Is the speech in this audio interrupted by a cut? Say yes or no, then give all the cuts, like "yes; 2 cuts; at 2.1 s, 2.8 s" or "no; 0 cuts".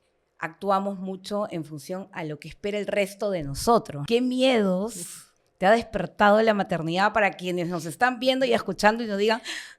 yes; 1 cut; at 3.9 s